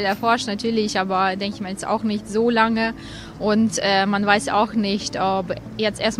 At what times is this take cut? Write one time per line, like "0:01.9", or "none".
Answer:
none